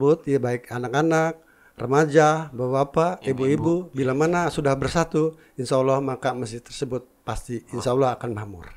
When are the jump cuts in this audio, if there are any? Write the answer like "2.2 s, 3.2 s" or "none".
none